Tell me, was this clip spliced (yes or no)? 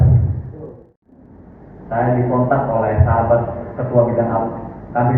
yes